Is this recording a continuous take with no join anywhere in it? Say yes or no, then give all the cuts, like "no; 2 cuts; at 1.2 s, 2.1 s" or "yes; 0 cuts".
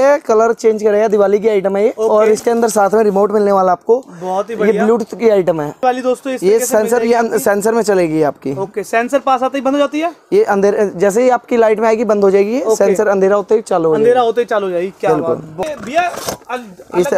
no; 2 cuts; at 5.8 s, 15.6 s